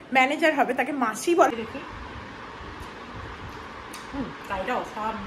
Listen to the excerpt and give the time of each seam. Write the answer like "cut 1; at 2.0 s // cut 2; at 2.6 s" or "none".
cut 1; at 1.5 s

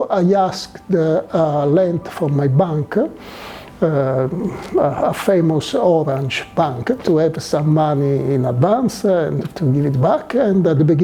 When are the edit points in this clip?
none

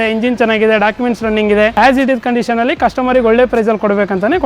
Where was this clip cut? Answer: cut 1; at 1.7 s

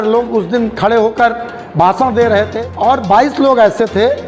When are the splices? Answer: cut 1; at 2.6 s

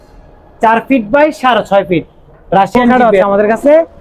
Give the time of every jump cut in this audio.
cut 1; at 2.9 s

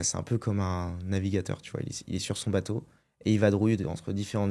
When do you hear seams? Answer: none

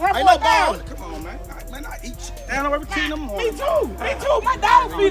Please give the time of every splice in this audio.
none

